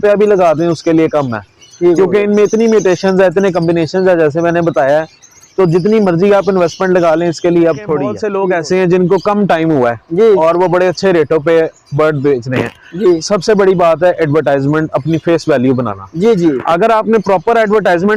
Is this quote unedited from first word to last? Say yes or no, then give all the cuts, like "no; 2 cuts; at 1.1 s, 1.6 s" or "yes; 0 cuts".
no; 1 cut; at 8.2 s